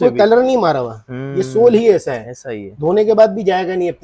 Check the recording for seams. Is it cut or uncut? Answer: uncut